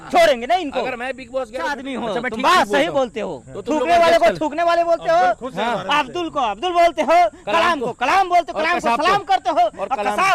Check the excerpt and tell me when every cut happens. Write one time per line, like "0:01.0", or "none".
0:01.8